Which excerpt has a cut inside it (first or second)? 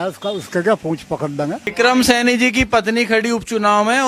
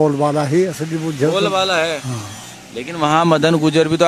first